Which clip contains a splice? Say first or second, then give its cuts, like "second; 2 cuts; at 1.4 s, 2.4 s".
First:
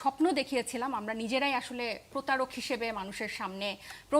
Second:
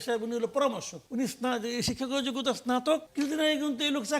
second; 2 cuts; at 0.9 s, 3.1 s